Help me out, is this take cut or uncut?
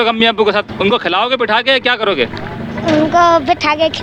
uncut